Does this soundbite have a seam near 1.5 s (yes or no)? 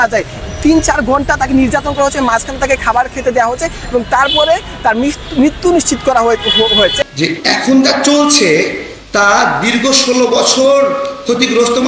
no